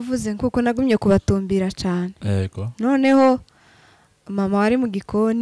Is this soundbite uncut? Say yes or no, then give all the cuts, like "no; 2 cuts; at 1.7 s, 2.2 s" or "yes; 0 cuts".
yes; 0 cuts